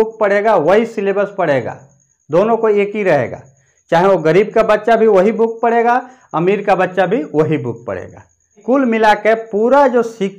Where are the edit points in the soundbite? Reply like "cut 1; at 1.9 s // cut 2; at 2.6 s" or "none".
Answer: cut 1; at 8.6 s